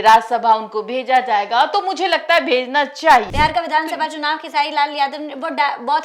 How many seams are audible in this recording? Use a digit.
1